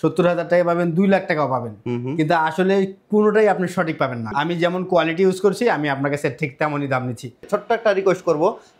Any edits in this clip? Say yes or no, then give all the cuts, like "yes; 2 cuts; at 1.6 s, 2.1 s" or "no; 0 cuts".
yes; 2 cuts; at 4.3 s, 7.5 s